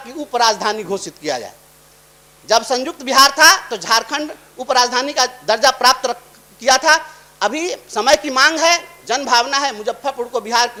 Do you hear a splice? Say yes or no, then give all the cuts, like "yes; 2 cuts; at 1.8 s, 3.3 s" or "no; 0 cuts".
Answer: no; 0 cuts